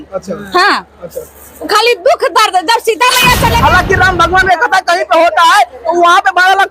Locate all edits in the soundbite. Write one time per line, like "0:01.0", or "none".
0:03.6